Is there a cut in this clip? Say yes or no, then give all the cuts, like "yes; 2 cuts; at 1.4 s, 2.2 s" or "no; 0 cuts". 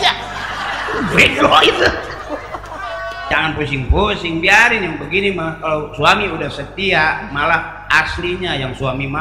yes; 1 cut; at 3.3 s